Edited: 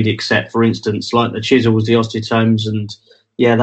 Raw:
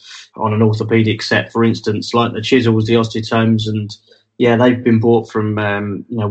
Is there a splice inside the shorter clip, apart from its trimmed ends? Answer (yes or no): no